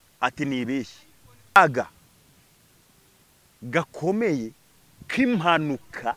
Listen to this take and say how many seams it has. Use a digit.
1